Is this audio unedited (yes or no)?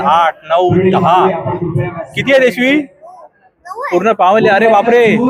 yes